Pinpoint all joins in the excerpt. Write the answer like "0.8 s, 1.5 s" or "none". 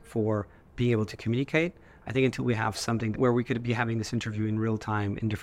3.1 s